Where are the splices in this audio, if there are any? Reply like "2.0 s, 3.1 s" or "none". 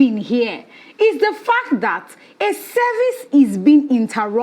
none